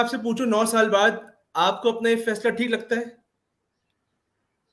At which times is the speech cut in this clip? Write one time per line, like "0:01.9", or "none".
none